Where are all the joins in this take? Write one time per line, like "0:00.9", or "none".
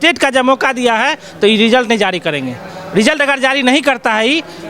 none